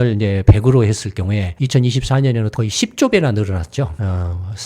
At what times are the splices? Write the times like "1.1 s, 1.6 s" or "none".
1.5 s, 2.5 s